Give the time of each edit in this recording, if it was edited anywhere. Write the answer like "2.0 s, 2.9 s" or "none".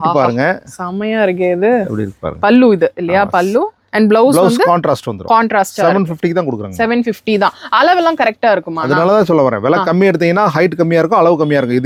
none